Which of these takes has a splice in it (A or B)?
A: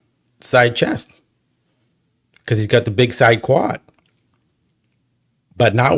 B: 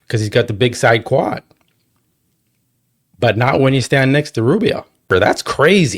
B